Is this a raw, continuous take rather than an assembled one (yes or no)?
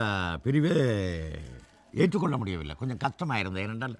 yes